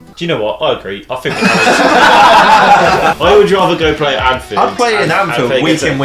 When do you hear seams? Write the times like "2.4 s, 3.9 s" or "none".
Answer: 3.2 s